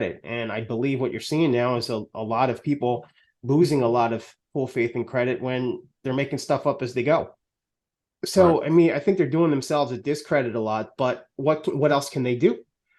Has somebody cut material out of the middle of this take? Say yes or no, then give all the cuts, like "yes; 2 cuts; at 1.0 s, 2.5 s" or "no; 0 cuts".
no; 0 cuts